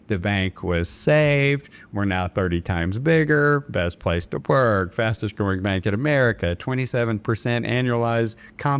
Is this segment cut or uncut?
uncut